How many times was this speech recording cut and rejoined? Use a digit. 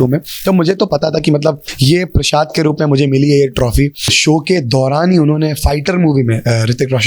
2